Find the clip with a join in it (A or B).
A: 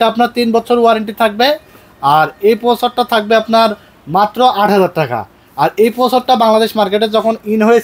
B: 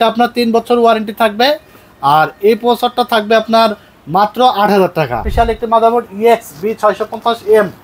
B